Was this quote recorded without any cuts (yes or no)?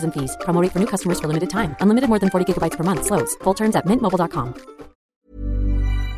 no